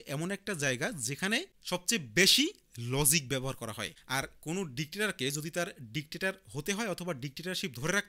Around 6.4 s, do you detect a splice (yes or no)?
no